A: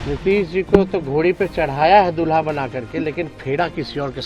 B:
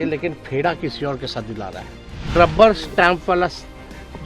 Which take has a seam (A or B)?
B